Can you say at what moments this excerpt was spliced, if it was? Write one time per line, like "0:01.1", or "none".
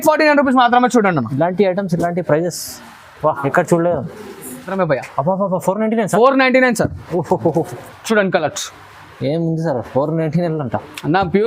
0:04.7